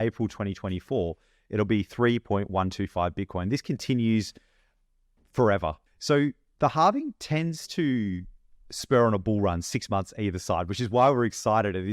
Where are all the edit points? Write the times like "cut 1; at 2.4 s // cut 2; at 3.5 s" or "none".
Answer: cut 1; at 5.8 s